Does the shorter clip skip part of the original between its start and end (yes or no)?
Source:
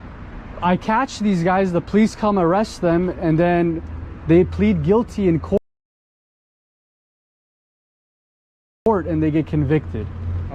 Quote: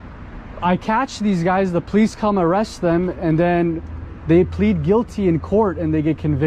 yes